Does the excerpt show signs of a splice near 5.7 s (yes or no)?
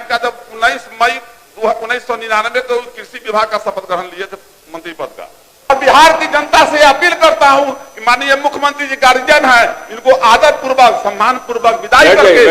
yes